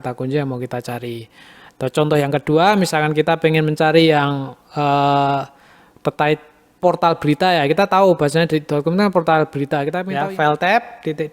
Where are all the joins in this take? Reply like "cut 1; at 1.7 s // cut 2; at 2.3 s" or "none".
cut 1; at 10.0 s

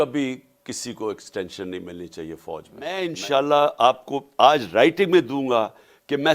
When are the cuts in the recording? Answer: cut 1; at 3.0 s

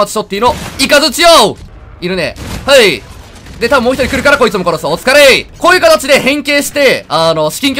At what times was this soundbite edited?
cut 1; at 1.7 s // cut 2; at 5.5 s

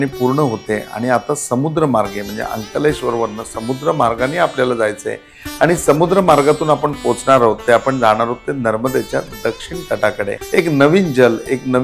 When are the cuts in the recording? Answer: cut 1; at 10.3 s

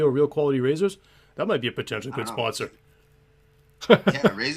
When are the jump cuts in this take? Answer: cut 1; at 1.7 s

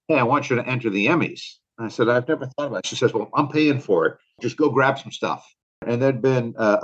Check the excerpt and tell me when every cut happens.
cut 1; at 4.4 s // cut 2; at 5.9 s

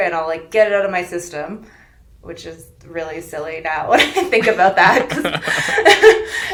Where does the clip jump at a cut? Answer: none

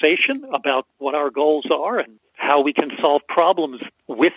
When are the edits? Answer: cut 1; at 2.2 s

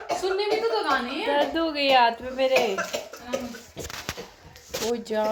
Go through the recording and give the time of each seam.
none

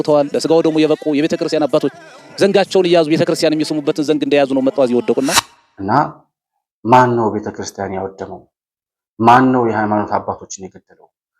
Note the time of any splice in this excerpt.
cut 1; at 5.3 s

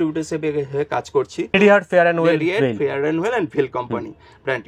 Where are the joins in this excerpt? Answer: cut 1; at 1.5 s

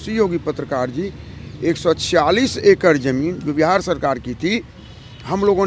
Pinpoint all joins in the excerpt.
none

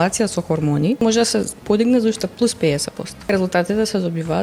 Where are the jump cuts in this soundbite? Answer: cut 1; at 1.0 s // cut 2; at 3.3 s

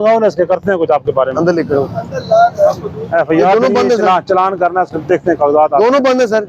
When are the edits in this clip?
none

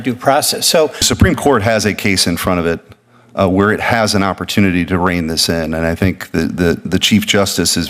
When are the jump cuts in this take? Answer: cut 1; at 1.1 s

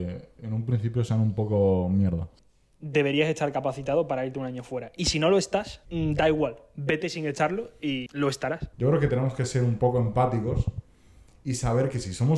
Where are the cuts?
cut 1; at 2.3 s // cut 2; at 5.8 s // cut 3; at 8.2 s

